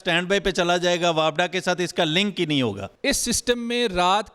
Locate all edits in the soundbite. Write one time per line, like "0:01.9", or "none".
0:02.9